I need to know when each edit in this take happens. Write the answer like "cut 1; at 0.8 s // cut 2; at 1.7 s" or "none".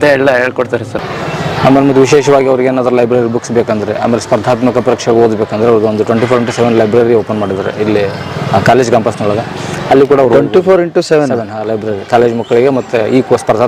cut 1; at 1.1 s